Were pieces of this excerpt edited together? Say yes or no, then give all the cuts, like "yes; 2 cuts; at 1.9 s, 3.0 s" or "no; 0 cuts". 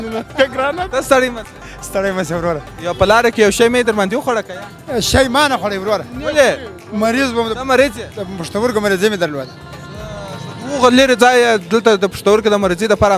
no; 0 cuts